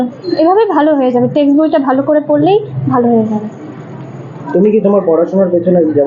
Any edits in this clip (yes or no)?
no